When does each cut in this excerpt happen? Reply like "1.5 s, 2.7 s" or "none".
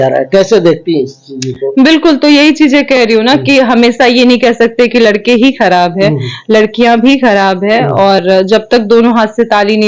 none